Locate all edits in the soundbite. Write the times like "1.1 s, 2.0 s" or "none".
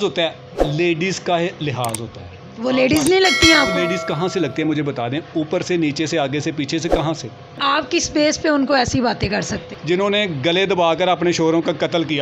7.6 s, 9.7 s

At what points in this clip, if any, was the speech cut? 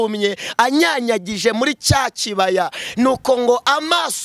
none

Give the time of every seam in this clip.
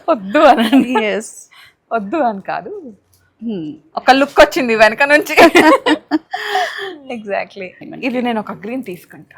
7.8 s

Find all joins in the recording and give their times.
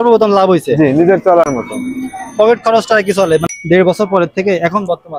3.4 s

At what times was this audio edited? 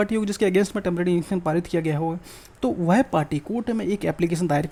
none

